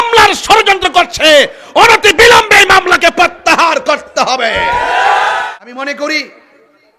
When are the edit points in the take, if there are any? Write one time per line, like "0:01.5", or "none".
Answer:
0:05.4